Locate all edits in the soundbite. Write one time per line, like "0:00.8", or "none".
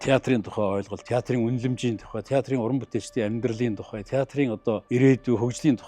0:01.0
0:04.8